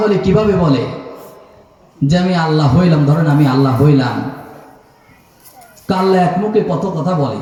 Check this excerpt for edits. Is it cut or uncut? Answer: uncut